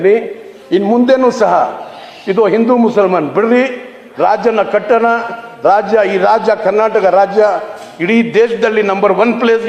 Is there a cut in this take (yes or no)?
no